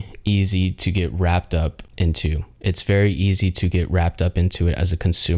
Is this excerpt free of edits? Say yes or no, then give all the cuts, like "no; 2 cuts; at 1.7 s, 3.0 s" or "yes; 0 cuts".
no; 1 cut; at 1.8 s